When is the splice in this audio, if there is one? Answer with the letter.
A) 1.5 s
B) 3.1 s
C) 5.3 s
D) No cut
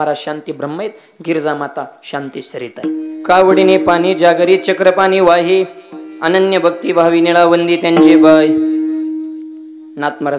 B